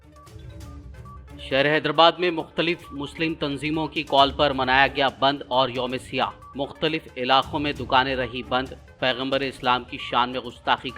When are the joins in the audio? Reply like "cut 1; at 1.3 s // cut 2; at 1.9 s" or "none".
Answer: cut 1; at 0.9 s